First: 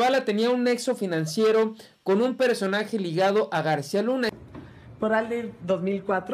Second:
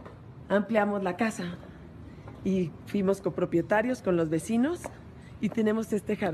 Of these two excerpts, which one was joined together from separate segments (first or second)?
first